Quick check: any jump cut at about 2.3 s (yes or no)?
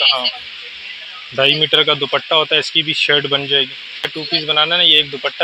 no